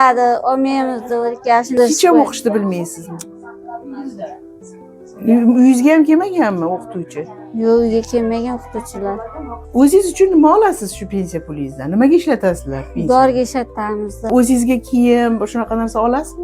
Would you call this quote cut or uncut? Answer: cut